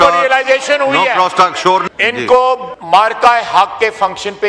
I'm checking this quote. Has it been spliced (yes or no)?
yes